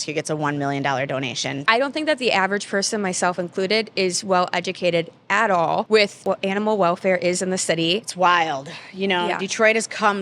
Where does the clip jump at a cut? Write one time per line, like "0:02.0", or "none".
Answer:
0:01.5
0:06.2
0:08.1